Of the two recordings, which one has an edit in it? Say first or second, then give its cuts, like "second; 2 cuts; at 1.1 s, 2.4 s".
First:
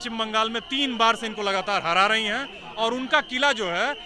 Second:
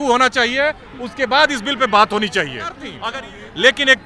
second; 1 cut; at 2.9 s